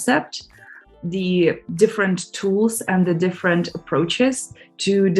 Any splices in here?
yes; 1 cut; at 1.0 s

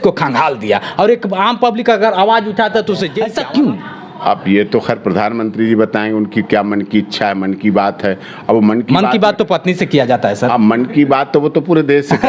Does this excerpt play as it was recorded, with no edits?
no; 1 cut; at 3.1 s

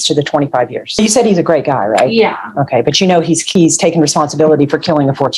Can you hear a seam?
yes; 2 cuts; at 1.0 s, 3.4 s

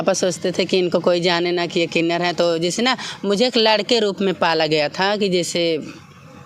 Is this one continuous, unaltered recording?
yes; 0 cuts

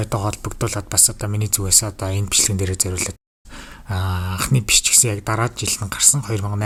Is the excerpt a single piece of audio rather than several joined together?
yes; 0 cuts

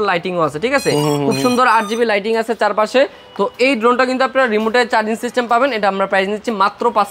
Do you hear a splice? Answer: no; 0 cuts

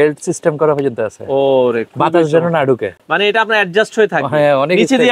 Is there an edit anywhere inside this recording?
no; 0 cuts

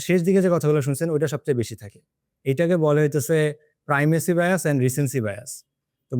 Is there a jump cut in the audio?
no; 0 cuts

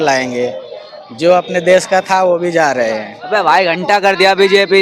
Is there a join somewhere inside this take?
yes; 1 cut; at 3.1 s

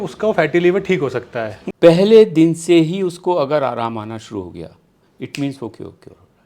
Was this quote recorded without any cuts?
no; 1 cut; at 1.6 s

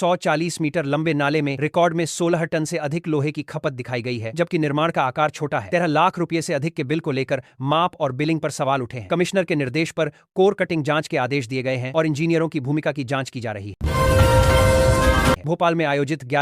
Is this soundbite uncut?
no; 2 cuts; at 13.8 s, 15.4 s

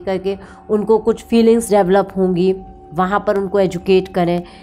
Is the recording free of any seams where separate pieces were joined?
yes; 0 cuts

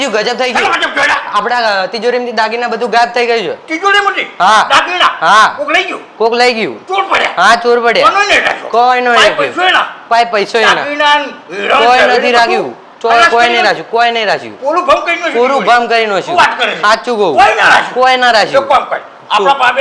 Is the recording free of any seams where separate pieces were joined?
yes; 0 cuts

